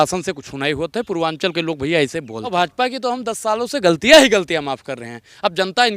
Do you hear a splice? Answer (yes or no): yes